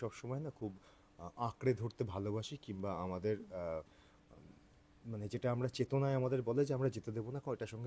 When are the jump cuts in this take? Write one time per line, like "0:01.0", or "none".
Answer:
none